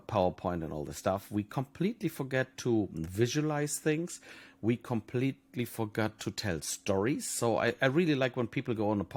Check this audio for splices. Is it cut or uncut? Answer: uncut